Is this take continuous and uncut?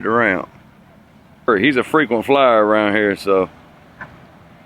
no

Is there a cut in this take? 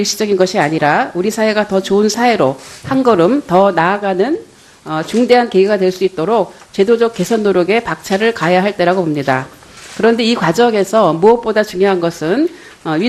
yes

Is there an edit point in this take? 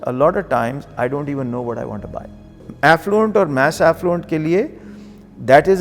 yes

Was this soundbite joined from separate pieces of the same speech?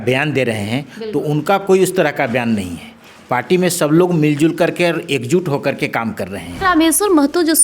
yes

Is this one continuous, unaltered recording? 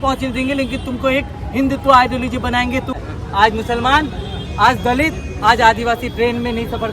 no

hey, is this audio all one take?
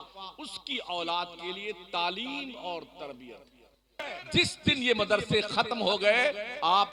no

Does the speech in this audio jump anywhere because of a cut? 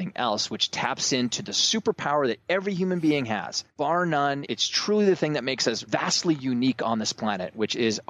yes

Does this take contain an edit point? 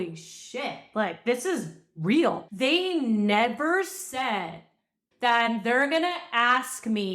yes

